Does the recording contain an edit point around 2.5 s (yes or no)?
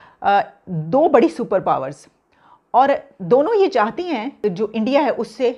no